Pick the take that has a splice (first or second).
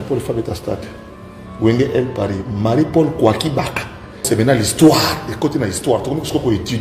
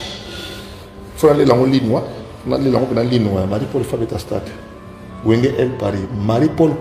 first